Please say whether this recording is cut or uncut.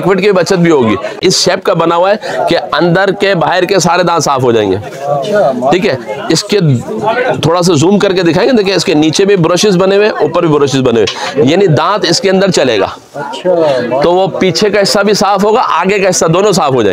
cut